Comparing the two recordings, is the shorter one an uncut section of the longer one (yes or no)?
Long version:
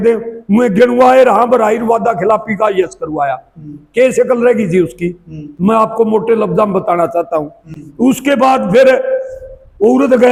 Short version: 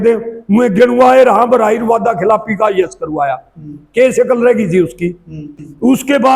no